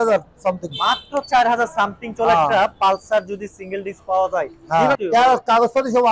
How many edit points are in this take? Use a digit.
1